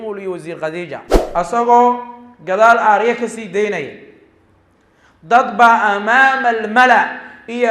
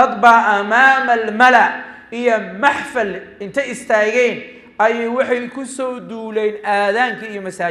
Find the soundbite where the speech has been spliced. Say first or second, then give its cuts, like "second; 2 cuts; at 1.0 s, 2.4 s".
first; 1 cut; at 1.1 s